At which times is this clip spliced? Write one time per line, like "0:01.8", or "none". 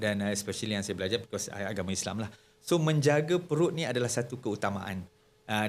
none